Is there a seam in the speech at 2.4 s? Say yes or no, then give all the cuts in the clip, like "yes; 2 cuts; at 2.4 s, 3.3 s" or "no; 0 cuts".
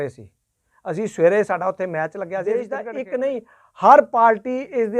yes; 1 cut; at 2.4 s